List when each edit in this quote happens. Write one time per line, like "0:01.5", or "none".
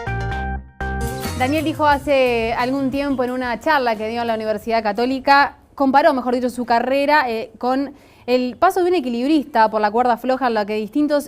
0:01.0